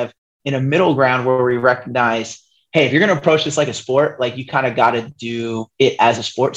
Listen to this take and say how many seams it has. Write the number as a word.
zero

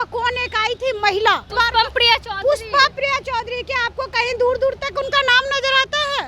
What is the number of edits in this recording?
one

